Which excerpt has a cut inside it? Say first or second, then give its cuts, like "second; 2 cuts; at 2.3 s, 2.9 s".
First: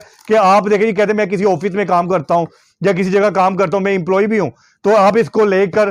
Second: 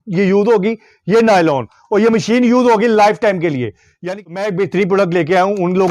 second; 1 cut; at 4.0 s